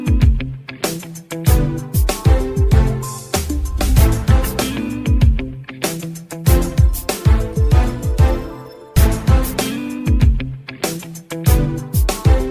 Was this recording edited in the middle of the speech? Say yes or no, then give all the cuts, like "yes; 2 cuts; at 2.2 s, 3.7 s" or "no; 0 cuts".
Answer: no; 0 cuts